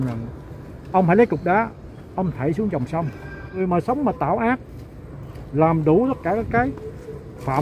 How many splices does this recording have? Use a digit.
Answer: 1